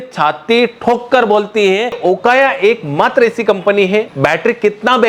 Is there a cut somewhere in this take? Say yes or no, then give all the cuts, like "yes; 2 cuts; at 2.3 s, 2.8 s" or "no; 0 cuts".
yes; 2 cuts; at 2.0 s, 4.1 s